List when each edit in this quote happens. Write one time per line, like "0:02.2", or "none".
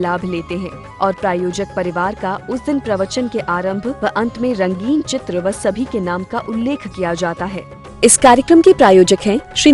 0:07.6